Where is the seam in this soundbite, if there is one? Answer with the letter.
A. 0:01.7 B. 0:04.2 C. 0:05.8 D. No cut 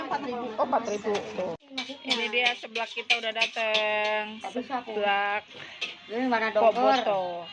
A